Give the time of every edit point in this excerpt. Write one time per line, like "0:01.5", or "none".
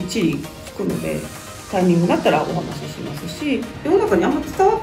0:03.7